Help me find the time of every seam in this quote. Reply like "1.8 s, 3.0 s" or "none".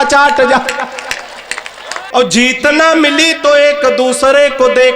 1.9 s